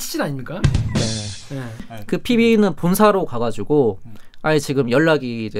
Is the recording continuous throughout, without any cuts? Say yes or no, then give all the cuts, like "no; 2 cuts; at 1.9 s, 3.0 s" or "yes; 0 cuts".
no; 1 cut; at 1.9 s